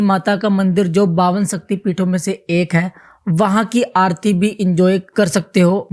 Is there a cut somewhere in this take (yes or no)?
no